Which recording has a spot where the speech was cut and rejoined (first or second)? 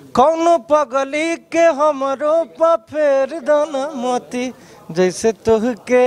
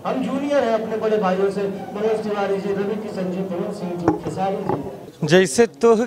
second